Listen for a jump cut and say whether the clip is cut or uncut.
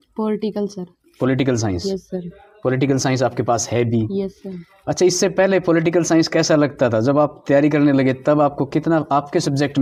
uncut